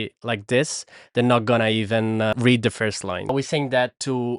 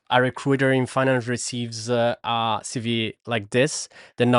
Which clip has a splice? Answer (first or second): first